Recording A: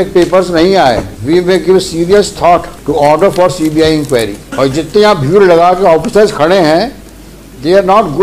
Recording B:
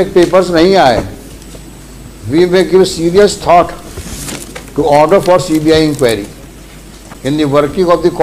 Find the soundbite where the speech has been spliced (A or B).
A